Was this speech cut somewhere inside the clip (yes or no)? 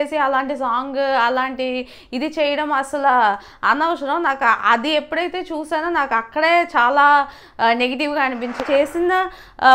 yes